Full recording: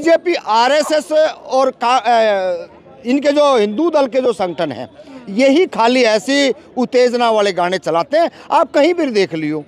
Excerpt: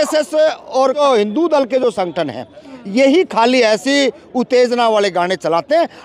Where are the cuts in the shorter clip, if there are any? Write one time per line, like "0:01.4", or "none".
0:01.0